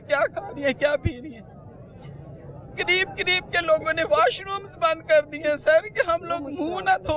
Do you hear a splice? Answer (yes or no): no